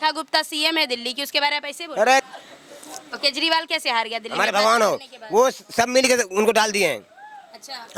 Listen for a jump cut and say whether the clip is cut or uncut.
uncut